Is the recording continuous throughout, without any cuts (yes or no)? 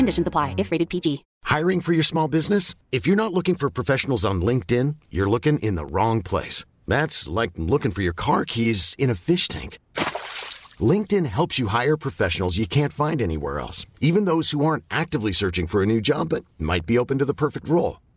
no